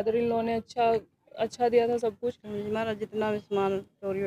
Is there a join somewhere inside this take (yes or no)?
yes